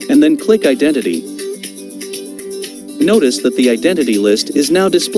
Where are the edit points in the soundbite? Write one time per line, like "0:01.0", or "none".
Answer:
none